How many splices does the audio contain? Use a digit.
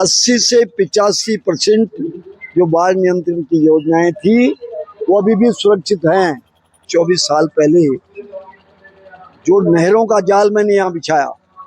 1